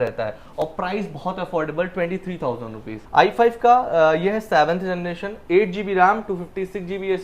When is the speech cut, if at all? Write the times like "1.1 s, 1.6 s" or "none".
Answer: 3.0 s